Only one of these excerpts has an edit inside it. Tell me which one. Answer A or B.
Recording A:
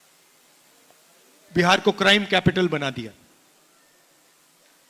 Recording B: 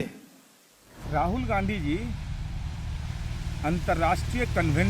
B